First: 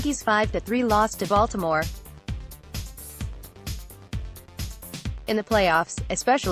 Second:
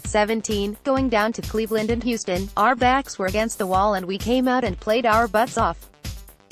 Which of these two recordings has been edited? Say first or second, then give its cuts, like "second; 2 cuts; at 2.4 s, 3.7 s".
first; 2 cuts; at 2.2 s, 5.1 s